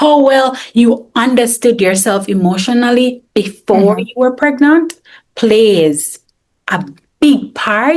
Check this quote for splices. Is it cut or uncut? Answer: uncut